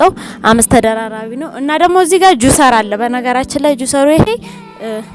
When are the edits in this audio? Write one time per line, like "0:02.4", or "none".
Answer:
none